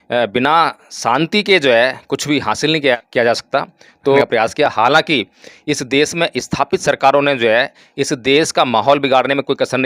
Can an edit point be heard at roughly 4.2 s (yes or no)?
yes